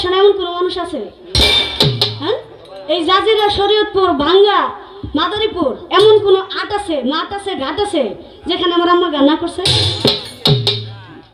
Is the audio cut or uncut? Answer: uncut